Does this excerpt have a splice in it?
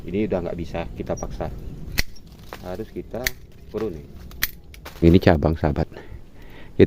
yes; 1 cut; at 5.0 s

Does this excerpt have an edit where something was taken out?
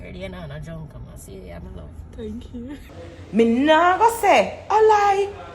yes; 1 cut; at 2.9 s

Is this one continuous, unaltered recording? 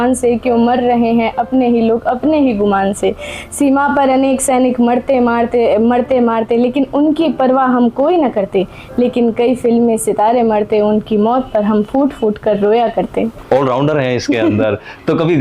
no; 1 cut; at 13.4 s

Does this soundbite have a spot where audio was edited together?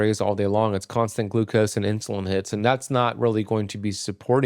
no; 0 cuts

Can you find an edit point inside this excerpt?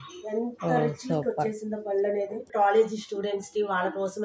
yes; 1 cut; at 2.4 s

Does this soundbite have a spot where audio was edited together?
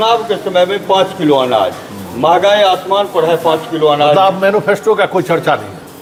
no; 0 cuts

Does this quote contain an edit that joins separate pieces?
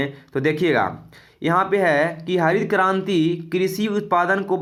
no; 0 cuts

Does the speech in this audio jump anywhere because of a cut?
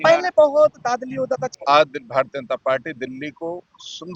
yes; 1 cut; at 1.5 s

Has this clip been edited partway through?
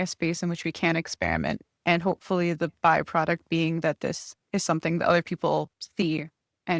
yes; 2 cuts; at 4.3 s, 5.8 s

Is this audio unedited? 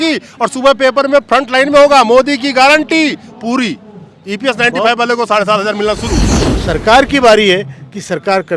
no; 1 cut; at 6.3 s

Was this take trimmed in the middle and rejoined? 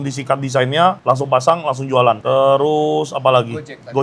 no; 0 cuts

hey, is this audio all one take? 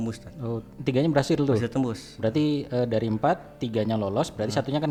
yes; 0 cuts

